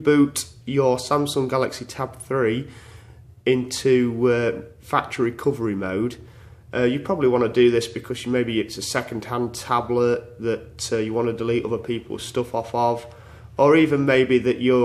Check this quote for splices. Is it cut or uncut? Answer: uncut